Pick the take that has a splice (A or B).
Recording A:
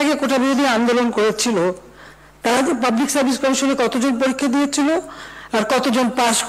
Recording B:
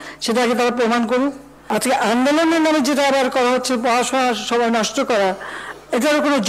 B